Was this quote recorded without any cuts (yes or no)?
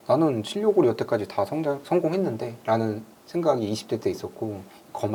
yes